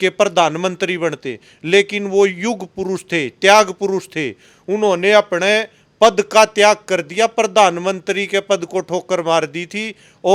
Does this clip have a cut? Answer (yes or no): no